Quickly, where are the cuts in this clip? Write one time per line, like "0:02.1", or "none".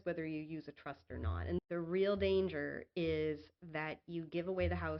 0:01.6

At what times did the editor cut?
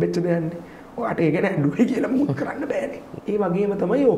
0:03.1

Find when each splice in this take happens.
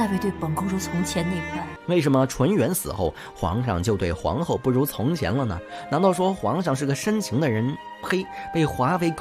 0:01.7

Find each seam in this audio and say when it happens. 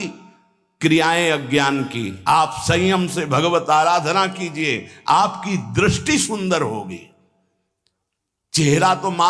0:02.1

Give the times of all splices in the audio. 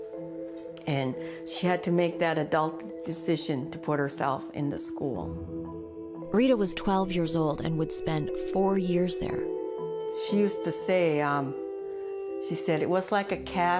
0:02.3

